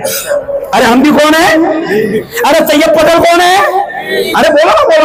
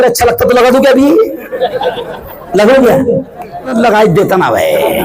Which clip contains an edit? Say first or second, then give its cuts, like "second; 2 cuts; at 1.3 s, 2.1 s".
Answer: second; 1 cut; at 3.7 s